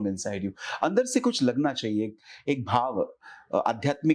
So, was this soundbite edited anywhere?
no; 0 cuts

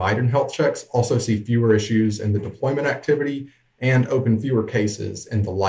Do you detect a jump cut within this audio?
no; 0 cuts

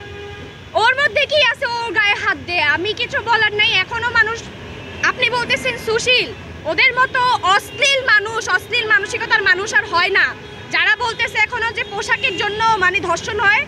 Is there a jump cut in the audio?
no; 0 cuts

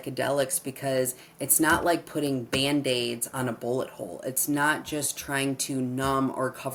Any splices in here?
no; 0 cuts

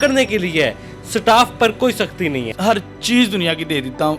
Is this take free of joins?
no; 1 cut; at 2.5 s

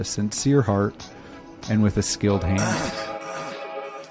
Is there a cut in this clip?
yes; 1 cut; at 2.7 s

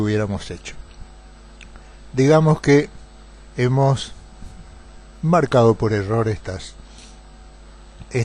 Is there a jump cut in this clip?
yes; 1 cut; at 1.0 s

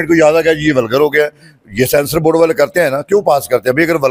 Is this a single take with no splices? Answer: yes; 0 cuts

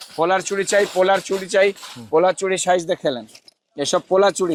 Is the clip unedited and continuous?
yes; 0 cuts

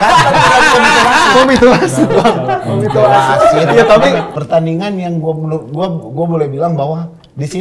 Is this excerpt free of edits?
no; 1 cut; at 4.3 s

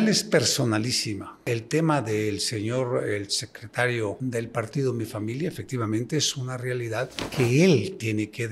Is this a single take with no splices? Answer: no; 3 cuts; at 1.4 s, 4.2 s, 7.2 s

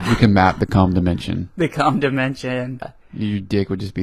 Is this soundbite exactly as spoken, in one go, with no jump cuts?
no; 1 cut; at 2.8 s

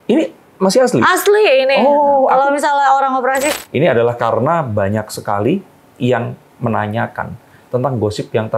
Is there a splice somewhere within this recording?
yes; 1 cut; at 3.5 s

